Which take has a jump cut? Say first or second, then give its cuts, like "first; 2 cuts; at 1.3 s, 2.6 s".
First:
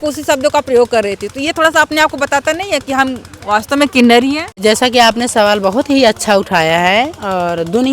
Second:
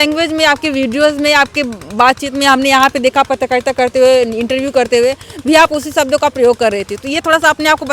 first; 1 cut; at 4.6 s